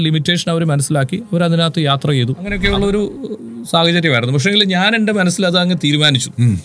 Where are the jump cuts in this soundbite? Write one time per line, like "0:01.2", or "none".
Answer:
0:02.6

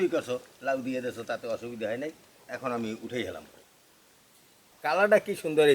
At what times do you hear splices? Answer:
none

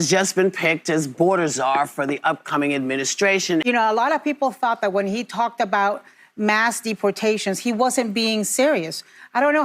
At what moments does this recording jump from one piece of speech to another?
0:03.6

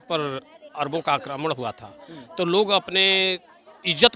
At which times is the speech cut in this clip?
none

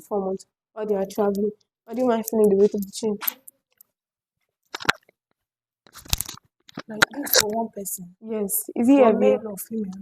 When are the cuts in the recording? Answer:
0:04.7

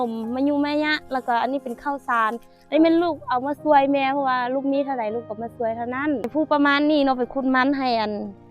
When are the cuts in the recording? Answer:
0:06.3

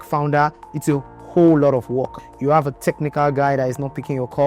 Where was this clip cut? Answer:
0:02.1

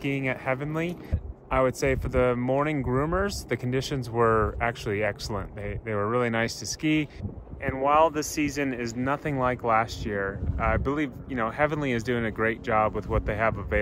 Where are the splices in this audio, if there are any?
0:01.3
0:07.3

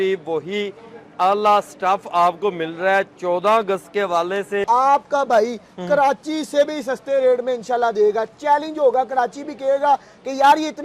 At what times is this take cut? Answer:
0:04.6

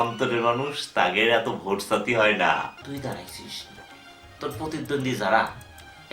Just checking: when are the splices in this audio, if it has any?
0:02.7

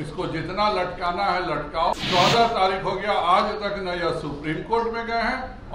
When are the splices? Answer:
0:01.9

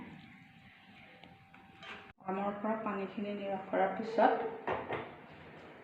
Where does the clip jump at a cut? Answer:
0:02.1

